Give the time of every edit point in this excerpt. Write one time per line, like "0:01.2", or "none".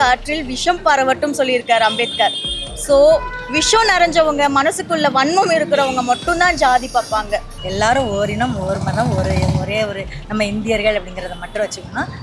0:07.6